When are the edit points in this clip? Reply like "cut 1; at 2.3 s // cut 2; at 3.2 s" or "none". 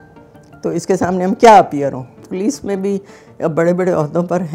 cut 1; at 2.3 s